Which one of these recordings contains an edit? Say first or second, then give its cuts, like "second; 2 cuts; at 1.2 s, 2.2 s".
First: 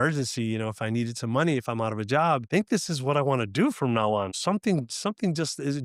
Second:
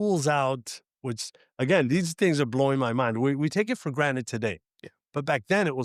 first; 2 cuts; at 2.4 s, 4.3 s